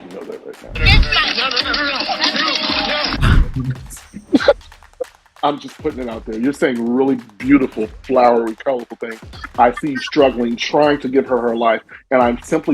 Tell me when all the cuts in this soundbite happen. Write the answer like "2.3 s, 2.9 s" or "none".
3.2 s